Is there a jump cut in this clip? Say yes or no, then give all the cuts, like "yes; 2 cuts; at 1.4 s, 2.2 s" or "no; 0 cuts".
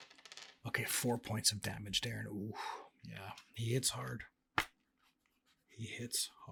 no; 0 cuts